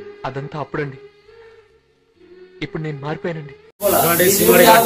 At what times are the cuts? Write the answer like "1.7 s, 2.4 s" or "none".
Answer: 3.8 s